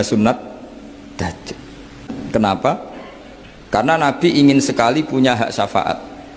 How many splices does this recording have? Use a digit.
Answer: 1